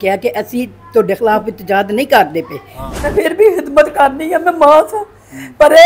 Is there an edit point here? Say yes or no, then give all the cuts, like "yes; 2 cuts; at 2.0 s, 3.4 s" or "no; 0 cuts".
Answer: yes; 1 cut; at 3.1 s